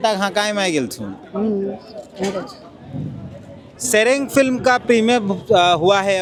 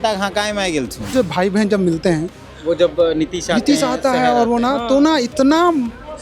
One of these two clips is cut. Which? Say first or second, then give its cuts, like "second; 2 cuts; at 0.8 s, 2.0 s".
second; 1 cut; at 1.1 s